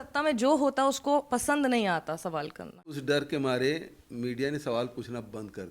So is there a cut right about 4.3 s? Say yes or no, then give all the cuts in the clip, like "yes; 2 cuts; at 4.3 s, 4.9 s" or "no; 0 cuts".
no; 1 cut; at 2.9 s